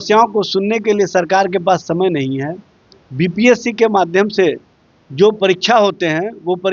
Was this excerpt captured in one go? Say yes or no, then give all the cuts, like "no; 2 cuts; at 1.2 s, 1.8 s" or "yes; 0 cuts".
yes; 0 cuts